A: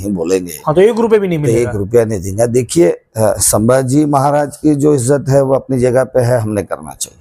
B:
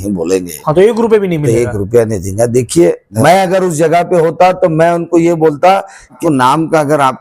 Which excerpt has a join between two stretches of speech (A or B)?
B